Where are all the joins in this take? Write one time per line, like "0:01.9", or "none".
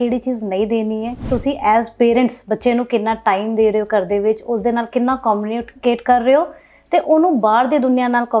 0:01.2